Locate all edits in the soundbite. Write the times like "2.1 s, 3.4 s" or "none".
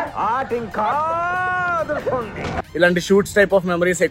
2.6 s